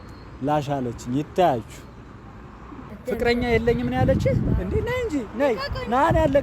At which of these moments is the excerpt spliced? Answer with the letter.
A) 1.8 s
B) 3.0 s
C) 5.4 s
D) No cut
B